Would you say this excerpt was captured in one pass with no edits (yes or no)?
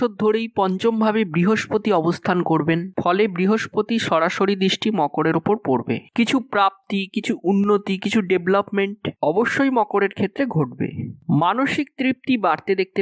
yes